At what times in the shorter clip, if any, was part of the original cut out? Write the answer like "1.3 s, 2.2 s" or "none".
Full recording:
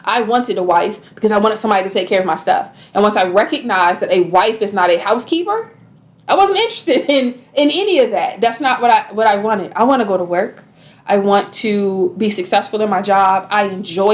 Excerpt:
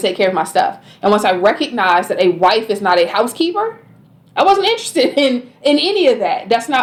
none